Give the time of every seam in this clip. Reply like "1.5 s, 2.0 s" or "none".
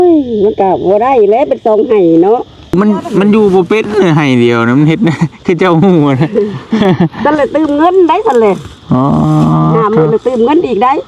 2.8 s

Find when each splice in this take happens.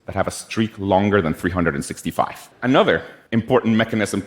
2.4 s, 3.2 s

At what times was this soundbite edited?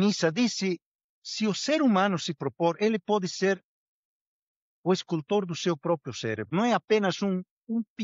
6.5 s

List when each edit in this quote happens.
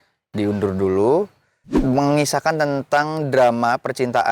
1.8 s

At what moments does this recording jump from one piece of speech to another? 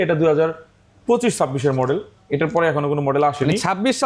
none

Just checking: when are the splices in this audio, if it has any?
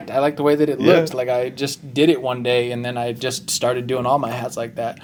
none

